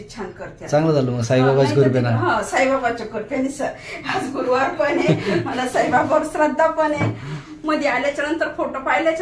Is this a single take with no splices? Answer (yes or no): yes